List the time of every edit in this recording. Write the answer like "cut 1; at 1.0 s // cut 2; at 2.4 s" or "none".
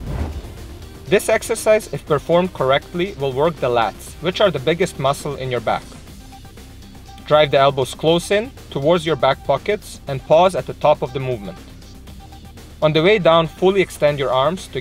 cut 1; at 5.8 s // cut 2; at 7.3 s